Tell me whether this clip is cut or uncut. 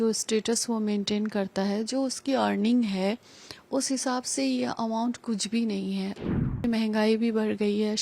cut